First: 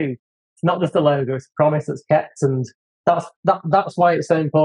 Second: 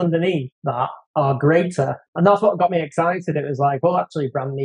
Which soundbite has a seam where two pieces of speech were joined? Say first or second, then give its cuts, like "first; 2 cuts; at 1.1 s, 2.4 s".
second; 2 cuts; at 1.0 s, 2.1 s